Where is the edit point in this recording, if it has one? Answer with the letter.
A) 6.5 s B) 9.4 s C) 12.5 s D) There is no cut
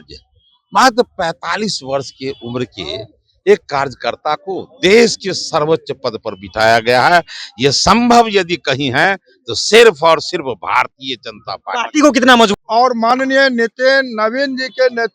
C